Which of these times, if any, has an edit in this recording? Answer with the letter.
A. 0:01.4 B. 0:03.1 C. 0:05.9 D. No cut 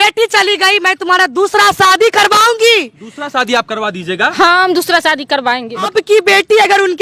C